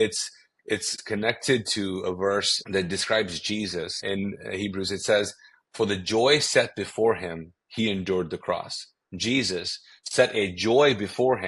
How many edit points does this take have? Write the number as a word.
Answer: three